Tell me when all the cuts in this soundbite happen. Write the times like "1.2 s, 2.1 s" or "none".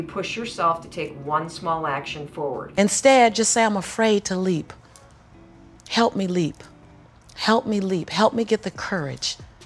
2.7 s